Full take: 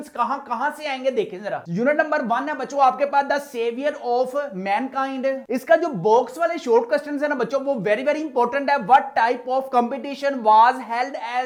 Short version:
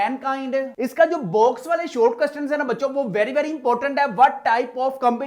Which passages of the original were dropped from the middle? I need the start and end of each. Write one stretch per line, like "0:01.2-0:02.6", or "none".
none

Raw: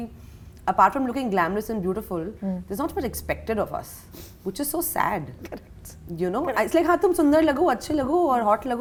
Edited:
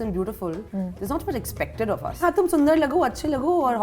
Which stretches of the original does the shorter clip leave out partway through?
0:03.9-0:06.9

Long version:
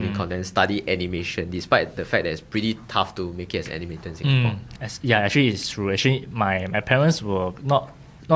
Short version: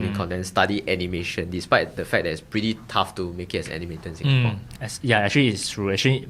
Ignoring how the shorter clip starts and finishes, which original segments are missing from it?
none

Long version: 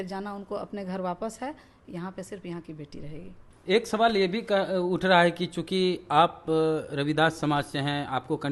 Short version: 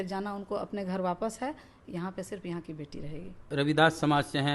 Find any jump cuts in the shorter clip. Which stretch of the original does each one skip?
0:03.5-0:06.9

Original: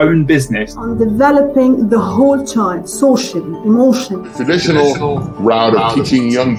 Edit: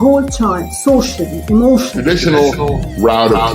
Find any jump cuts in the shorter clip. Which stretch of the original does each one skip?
0:04.1-0:04.3

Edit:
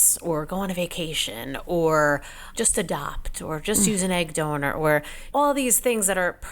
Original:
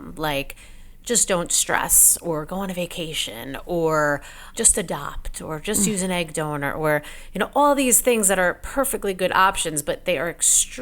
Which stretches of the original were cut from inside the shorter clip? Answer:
0:07.2-0:07.4

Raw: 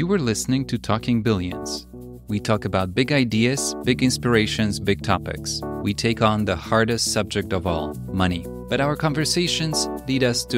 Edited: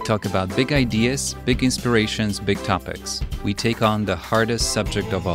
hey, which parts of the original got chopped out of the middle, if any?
none

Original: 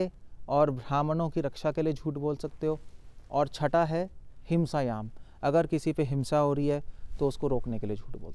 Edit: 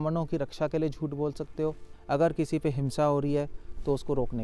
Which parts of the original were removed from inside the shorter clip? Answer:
0:02.9-0:05.2

